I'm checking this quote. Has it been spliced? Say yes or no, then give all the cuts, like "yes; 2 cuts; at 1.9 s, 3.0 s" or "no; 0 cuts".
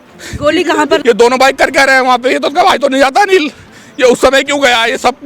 yes; 1 cut; at 1.0 s